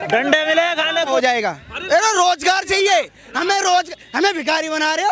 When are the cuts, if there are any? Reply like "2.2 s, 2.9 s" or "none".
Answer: 1.1 s